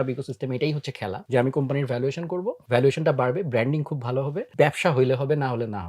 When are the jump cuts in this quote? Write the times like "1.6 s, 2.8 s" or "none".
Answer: 1.2 s, 2.6 s, 4.5 s